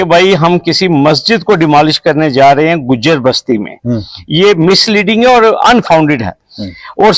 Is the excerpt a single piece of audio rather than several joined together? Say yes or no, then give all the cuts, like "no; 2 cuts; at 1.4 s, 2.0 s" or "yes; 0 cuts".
yes; 0 cuts